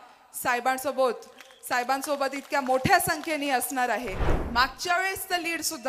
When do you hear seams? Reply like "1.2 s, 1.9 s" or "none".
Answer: 4.3 s